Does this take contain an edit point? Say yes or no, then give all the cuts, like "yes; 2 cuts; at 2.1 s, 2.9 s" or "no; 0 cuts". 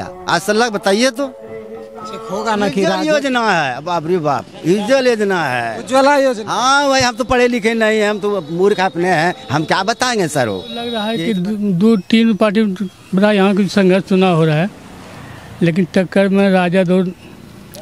yes; 2 cuts; at 2.9 s, 11.0 s